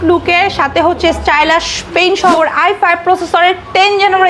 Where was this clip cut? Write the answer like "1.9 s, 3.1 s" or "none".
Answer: 2.3 s

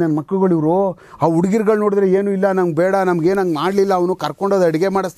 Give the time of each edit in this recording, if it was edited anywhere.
none

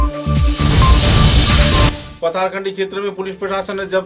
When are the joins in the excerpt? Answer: 2.0 s

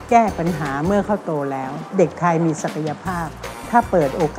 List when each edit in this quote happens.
1.8 s

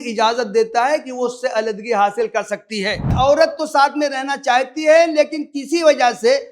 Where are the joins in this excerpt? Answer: 3.1 s

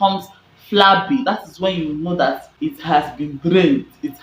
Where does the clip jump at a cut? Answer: 2.2 s

